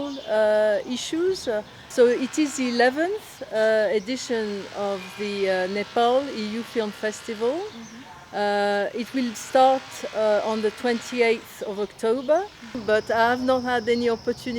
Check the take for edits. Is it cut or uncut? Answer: cut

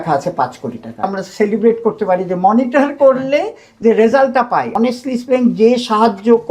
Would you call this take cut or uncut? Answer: cut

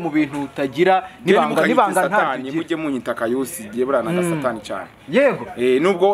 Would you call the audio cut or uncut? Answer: uncut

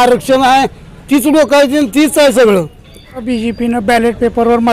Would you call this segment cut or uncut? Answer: cut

